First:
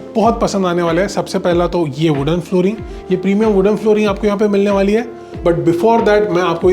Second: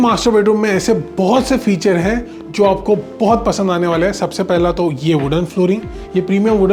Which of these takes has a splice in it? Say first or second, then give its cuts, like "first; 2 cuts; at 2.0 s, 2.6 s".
first; 1 cut; at 5.3 s